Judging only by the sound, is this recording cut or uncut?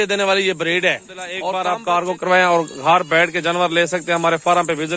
cut